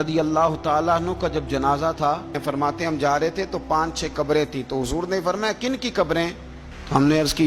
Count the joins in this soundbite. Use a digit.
1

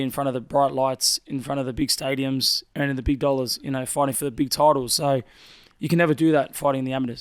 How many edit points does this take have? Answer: 0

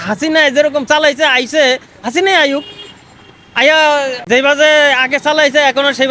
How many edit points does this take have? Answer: 1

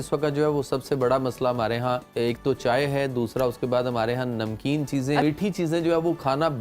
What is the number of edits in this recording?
2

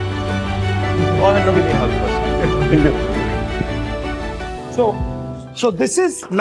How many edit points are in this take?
0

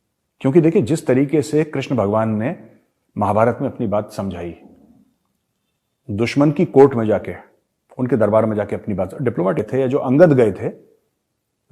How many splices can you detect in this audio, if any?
1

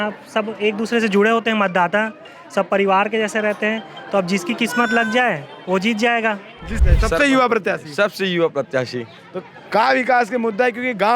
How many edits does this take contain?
1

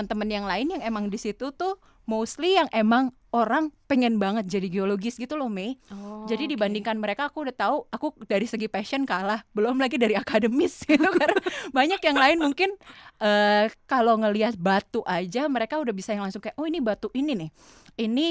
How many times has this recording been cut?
0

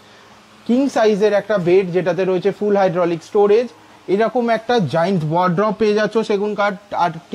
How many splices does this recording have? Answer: 0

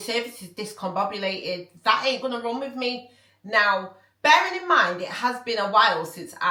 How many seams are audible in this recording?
0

